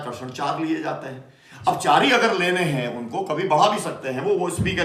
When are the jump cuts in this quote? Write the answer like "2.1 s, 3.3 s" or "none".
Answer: none